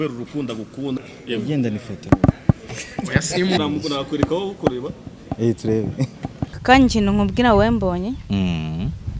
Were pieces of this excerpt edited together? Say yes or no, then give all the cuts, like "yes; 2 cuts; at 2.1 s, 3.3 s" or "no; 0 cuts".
yes; 4 cuts; at 1.0 s, 1.9 s, 3.6 s, 6.5 s